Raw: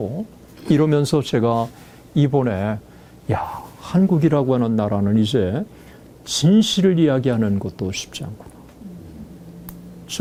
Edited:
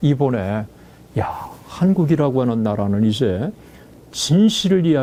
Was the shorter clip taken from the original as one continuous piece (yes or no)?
yes